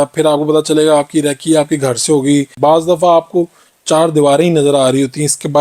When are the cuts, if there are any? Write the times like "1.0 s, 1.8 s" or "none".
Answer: 2.6 s